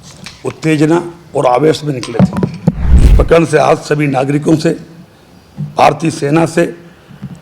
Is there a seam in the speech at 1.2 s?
no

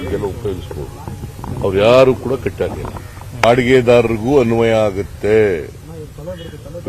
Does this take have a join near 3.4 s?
yes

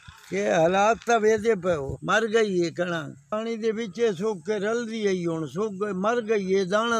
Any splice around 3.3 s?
yes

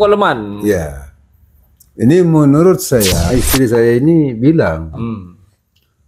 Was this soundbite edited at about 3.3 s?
yes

